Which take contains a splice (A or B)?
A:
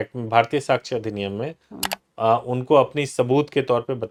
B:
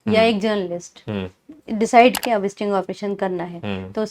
B